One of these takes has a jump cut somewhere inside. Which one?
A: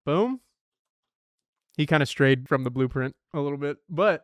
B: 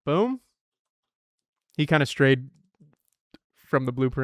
A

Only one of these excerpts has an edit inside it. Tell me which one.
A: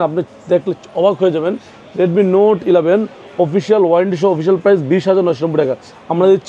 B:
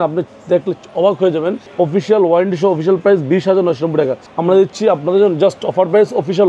B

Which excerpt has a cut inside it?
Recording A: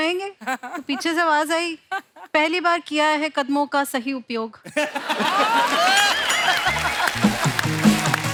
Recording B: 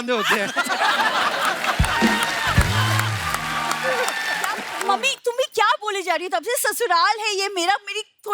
B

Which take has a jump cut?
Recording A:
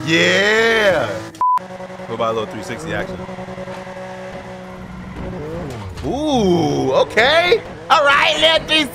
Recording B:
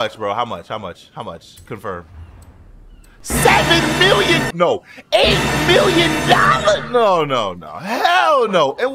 A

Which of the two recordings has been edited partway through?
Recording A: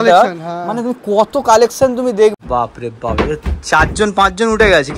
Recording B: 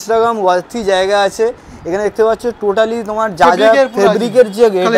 A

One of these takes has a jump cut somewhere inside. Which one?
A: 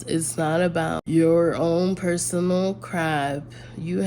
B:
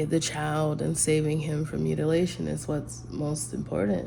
A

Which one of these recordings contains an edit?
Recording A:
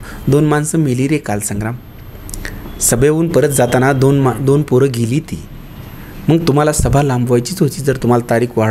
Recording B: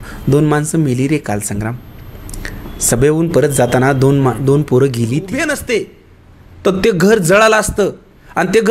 B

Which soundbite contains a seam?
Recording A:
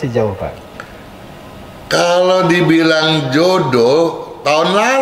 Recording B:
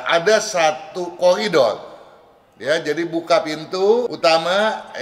B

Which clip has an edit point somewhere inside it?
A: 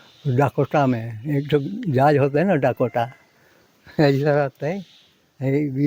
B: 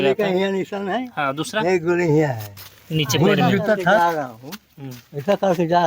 B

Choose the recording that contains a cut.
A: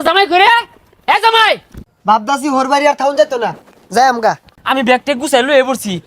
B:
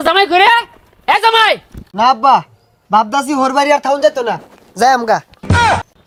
A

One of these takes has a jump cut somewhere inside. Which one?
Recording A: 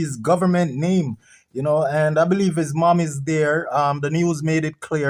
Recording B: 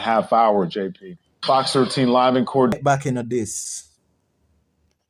B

